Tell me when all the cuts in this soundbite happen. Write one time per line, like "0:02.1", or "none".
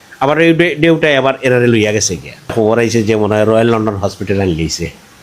0:02.5